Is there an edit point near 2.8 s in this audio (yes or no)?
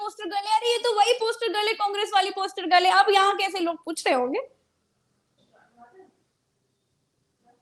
no